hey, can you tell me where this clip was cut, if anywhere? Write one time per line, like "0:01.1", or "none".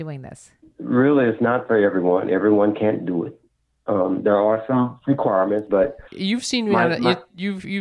0:06.1